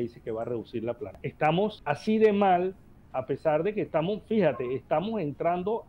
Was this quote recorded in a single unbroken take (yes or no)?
no